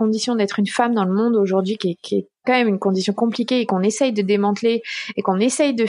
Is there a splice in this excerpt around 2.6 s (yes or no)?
no